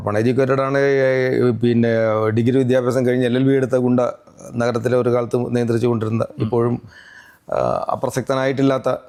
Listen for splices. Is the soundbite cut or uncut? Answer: uncut